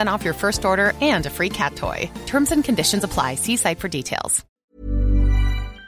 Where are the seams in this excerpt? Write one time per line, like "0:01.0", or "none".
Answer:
0:04.5